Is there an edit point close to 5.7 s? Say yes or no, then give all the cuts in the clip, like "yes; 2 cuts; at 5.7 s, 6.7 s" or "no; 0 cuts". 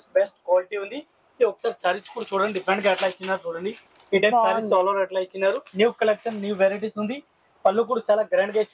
yes; 1 cut; at 5.7 s